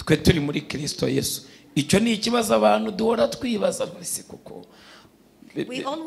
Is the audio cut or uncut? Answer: uncut